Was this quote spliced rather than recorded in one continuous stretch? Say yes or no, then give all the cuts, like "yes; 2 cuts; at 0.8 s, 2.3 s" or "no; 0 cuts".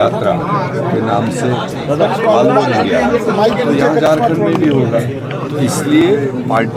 no; 0 cuts